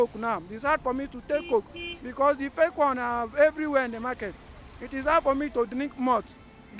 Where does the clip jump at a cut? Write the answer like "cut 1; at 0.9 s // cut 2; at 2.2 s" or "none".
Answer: none